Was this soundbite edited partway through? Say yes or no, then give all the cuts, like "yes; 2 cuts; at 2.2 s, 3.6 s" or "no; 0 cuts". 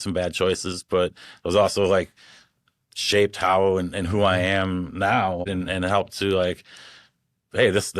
yes; 1 cut; at 5.5 s